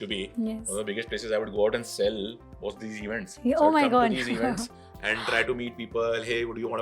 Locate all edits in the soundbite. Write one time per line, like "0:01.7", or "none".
none